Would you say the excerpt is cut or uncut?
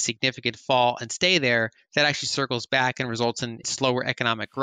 cut